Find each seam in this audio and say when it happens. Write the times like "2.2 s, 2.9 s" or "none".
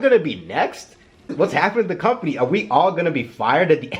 1.3 s